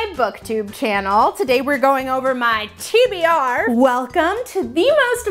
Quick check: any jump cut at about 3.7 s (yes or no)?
yes